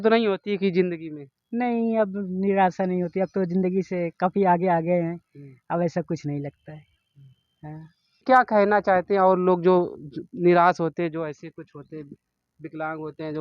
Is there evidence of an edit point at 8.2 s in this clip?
yes; 1 cut; at 8.2 s

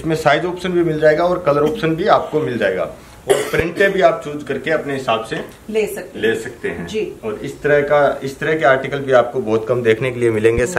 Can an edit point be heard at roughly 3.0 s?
no; 0 cuts

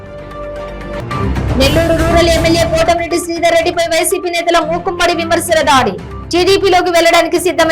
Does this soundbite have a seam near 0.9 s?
yes; 1 cut; at 0.9 s

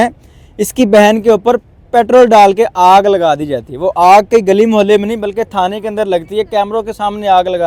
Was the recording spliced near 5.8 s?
no; 0 cuts

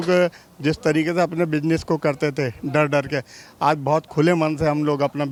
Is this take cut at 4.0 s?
no; 0 cuts

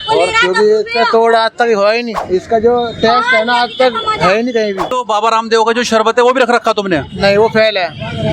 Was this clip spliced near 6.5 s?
no; 2 cuts; at 2.1 s, 4.9 s

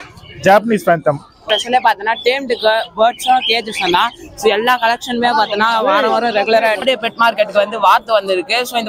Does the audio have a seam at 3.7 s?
no; 2 cuts; at 1.3 s, 6.8 s

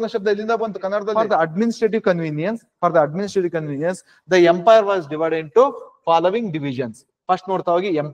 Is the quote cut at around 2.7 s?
no; 1 cut; at 1.1 s

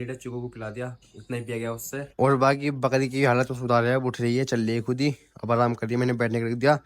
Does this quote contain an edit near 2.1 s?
yes; 1 cut; at 2.1 s

